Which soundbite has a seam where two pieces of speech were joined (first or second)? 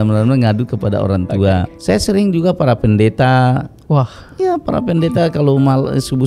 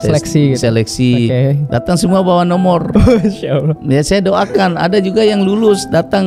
first